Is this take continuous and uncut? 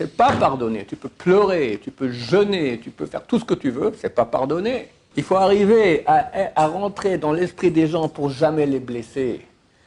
no; 1 cut; at 5.0 s

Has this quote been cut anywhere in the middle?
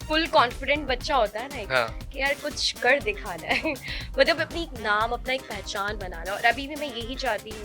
no; 0 cuts

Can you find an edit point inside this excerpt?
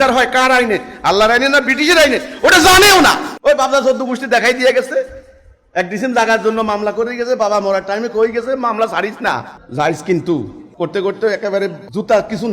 yes; 3 cuts; at 3.3 s, 9.6 s, 10.6 s

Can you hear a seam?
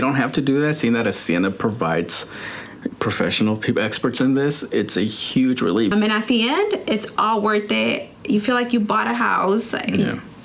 yes; 1 cut; at 5.9 s

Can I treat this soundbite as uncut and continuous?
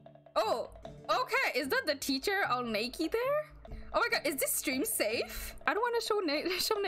yes; 0 cuts

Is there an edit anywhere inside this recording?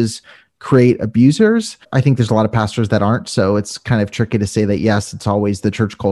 yes; 1 cut; at 1.8 s

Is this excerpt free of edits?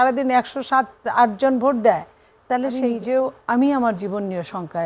no; 1 cut; at 2.8 s

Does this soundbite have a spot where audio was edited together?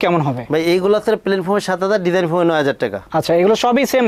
no; 0 cuts

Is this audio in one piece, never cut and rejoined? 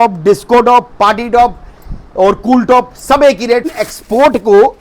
no; 1 cut; at 3.7 s

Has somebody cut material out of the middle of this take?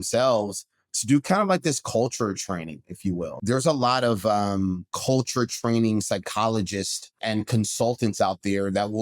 yes; 3 cuts; at 3.3 s, 4.9 s, 7.2 s

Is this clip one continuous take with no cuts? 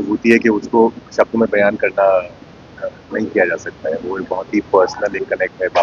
yes; 0 cuts

